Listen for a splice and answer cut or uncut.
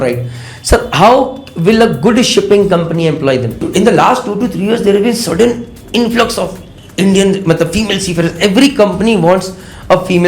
cut